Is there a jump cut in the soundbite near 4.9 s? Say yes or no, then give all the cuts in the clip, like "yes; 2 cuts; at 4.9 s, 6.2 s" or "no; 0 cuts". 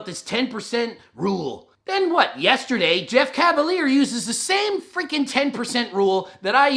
no; 1 cut; at 1.7 s